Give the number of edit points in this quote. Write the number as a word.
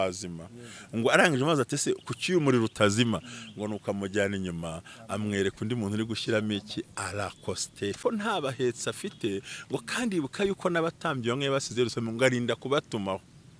one